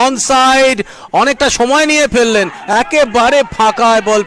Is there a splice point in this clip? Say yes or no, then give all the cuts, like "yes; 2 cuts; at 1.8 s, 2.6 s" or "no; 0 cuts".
no; 0 cuts